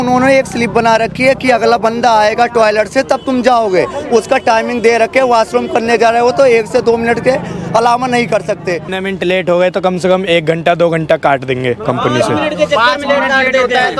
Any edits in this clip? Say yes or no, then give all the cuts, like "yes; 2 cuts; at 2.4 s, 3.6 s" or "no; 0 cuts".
yes; 1 cut; at 8.9 s